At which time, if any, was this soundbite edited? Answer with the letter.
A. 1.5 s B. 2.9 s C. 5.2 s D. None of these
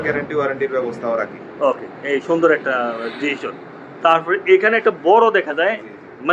D